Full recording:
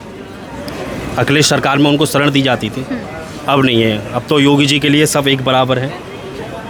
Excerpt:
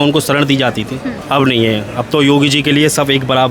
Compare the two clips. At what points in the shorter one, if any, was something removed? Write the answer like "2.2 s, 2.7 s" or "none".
1.1 s